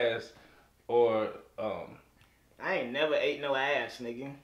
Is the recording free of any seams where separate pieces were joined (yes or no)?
yes